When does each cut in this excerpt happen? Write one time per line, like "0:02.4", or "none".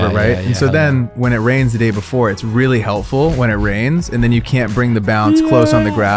none